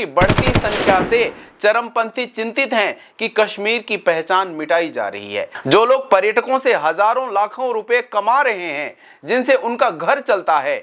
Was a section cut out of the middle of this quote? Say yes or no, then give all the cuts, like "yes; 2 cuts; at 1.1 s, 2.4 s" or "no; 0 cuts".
yes; 1 cut; at 5.5 s